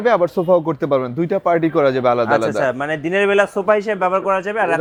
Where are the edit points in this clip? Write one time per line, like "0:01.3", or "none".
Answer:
none